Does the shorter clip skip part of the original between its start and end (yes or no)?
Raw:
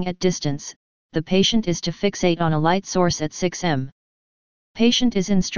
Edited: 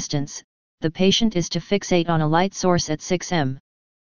no